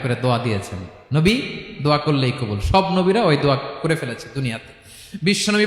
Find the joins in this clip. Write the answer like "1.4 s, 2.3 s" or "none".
none